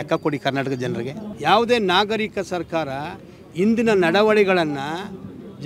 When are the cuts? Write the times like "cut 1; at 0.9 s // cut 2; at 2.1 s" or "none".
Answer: cut 1; at 1.3 s